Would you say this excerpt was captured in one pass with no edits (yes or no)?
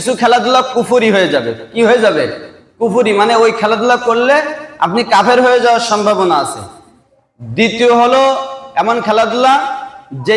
yes